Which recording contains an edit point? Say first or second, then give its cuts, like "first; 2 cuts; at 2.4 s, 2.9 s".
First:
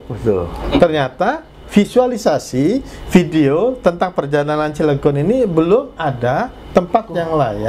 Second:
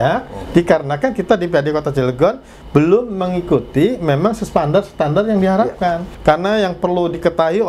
second; 1 cut; at 6.1 s